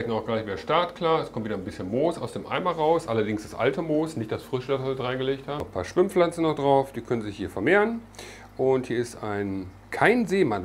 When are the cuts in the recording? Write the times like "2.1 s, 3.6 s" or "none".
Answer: 5.6 s